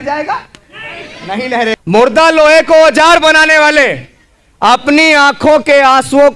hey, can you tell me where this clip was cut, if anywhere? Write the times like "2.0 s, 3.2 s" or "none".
1.8 s